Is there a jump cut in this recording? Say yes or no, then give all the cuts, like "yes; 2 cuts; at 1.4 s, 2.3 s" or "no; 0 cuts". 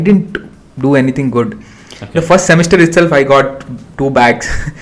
no; 0 cuts